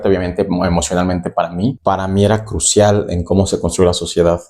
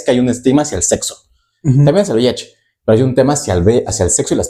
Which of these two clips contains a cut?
first; 1 cut; at 1.8 s

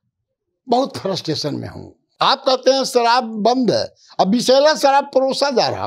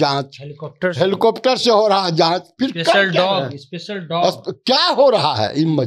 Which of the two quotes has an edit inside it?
first; 1 cut; at 2.1 s

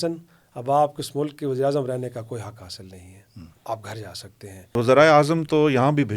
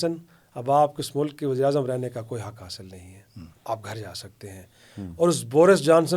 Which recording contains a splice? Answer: first; 1 cut; at 4.7 s

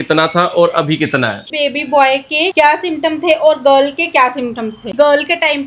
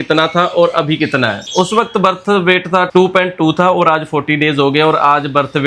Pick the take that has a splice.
first; 2 cuts; at 1.5 s, 4.9 s

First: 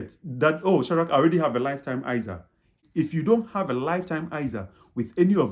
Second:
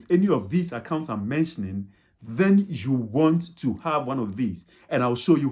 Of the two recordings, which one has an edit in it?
first; 1 cut; at 2.8 s

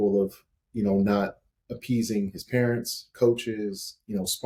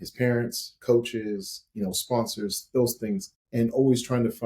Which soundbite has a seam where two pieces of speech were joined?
second; 1 cut; at 3.4 s

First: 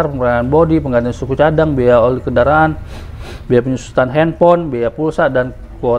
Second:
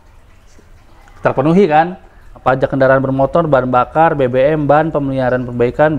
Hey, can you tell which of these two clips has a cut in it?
second; 1 cut; at 2.4 s

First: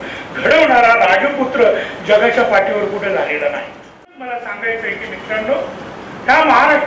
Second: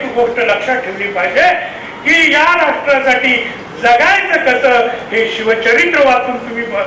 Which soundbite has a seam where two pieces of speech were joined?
first; 1 cut; at 4.1 s

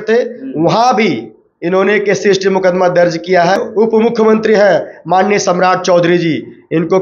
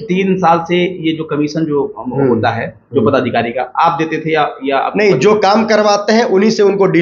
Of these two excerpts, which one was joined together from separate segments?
first; 1 cut; at 3.6 s

